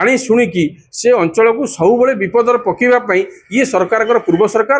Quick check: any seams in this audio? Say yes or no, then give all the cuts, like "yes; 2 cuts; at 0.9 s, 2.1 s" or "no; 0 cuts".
no; 0 cuts